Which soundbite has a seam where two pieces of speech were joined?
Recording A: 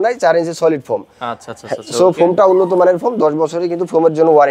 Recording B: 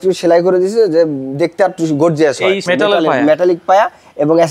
B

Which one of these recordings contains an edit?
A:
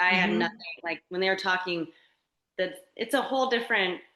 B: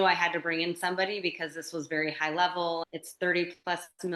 B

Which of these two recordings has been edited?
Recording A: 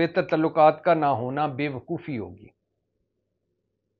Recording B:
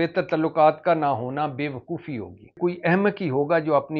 B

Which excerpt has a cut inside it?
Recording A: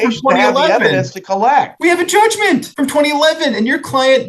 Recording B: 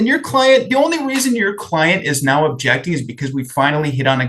A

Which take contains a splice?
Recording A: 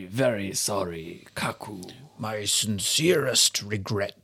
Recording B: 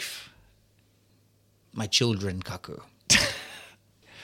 B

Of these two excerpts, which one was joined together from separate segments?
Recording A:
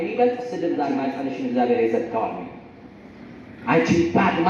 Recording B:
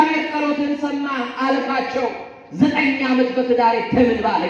A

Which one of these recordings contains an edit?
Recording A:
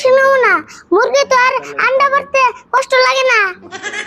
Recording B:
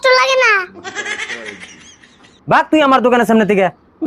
B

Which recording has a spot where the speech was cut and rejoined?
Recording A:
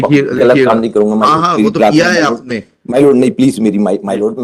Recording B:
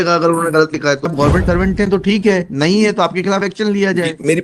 B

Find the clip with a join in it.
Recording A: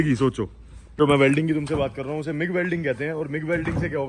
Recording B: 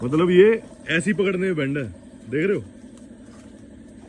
A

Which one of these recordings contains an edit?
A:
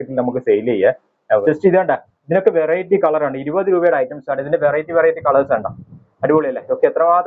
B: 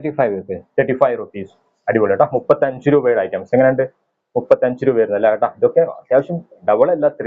A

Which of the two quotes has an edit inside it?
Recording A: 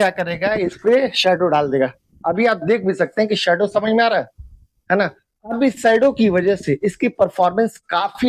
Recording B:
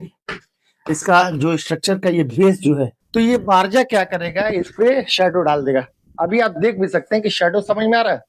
B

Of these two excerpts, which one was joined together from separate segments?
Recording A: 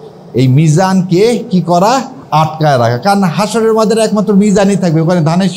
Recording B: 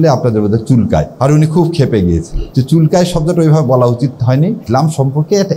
B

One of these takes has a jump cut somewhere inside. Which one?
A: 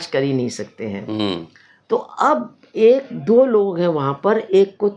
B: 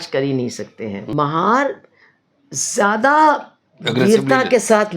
B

